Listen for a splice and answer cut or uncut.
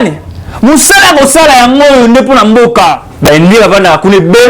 cut